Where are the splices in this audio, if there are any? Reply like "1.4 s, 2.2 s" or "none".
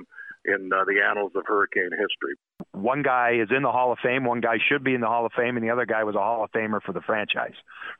2.3 s